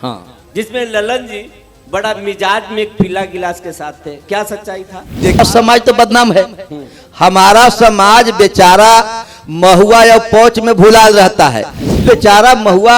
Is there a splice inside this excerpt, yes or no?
yes